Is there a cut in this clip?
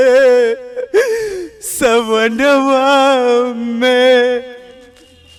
no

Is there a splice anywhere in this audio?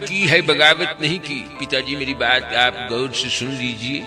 no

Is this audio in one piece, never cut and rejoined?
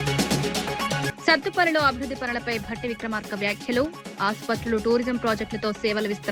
no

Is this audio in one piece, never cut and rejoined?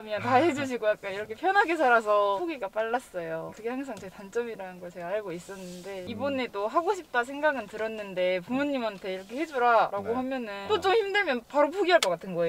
yes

